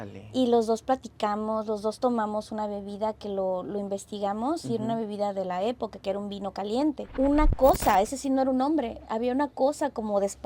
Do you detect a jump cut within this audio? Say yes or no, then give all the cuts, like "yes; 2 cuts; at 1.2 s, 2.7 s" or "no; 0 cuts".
yes; 1 cut; at 7.0 s